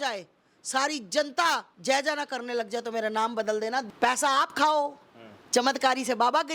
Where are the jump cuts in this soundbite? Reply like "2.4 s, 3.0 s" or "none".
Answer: 1.7 s, 3.9 s